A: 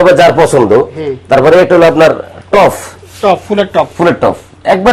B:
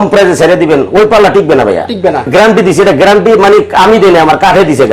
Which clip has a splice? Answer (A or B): B